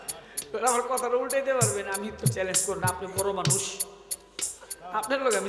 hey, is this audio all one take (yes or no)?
yes